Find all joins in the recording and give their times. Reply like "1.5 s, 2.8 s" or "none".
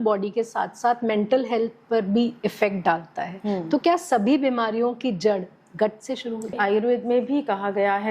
6.6 s